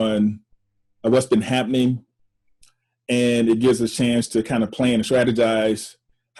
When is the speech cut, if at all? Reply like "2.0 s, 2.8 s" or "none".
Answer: none